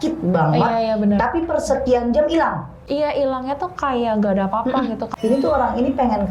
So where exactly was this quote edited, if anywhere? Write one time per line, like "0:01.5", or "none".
0:02.8
0:05.1